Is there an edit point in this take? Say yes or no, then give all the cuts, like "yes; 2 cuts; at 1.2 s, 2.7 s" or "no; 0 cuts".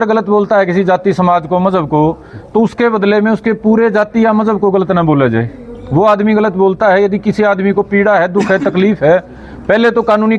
no; 0 cuts